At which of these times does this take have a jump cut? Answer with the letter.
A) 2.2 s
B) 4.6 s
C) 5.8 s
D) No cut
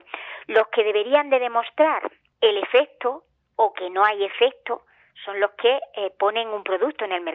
A